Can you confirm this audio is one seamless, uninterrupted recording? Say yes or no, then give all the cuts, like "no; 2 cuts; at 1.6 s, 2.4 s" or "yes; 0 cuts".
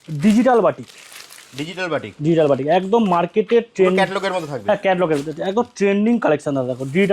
yes; 0 cuts